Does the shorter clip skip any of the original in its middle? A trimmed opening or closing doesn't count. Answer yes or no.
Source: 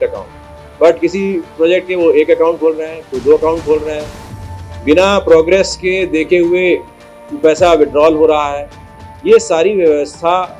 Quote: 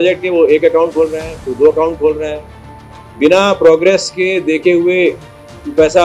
no